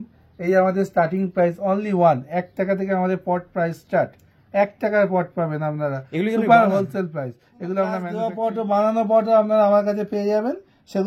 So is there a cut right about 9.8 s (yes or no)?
no